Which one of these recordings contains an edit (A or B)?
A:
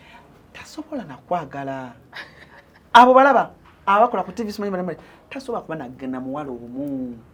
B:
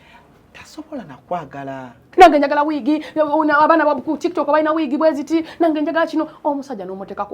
B